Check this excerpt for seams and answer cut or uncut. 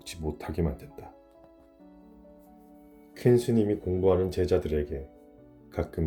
uncut